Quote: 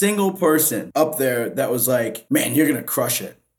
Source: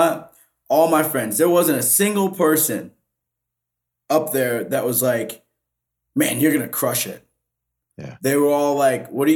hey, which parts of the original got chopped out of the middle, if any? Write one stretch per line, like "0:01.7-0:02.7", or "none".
0:02.8-0:04.0
0:05.3-0:06.0